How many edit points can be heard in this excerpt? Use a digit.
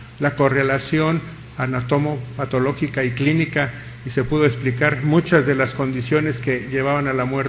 1